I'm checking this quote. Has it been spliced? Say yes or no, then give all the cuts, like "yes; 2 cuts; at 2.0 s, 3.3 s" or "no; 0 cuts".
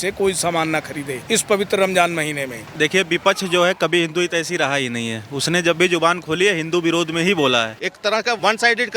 yes; 3 cuts; at 1.2 s, 2.6 s, 8.1 s